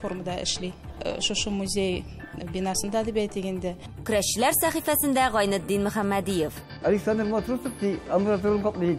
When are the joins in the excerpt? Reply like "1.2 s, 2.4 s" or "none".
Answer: none